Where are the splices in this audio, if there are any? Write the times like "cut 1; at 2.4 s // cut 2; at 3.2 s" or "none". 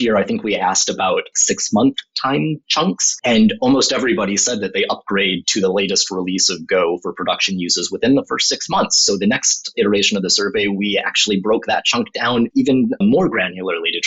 cut 1; at 1.3 s // cut 2; at 2.7 s // cut 3; at 12.8 s